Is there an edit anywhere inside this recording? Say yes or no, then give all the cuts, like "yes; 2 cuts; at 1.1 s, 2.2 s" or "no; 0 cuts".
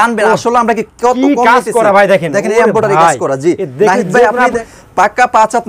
yes; 1 cut; at 4.6 s